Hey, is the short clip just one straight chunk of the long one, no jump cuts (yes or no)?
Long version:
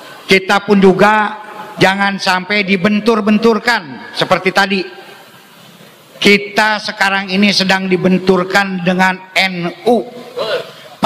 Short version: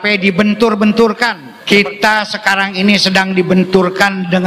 no